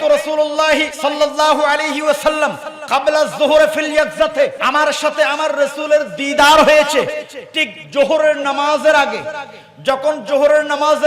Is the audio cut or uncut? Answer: cut